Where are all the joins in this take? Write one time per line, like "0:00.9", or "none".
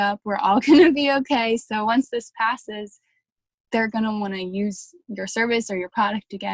none